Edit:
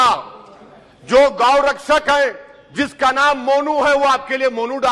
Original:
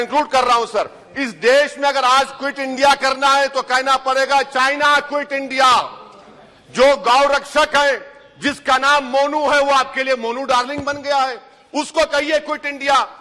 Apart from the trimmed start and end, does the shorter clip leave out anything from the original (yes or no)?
no